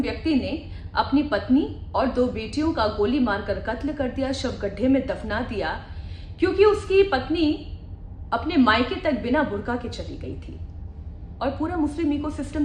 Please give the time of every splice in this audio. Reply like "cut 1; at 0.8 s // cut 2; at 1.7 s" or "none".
none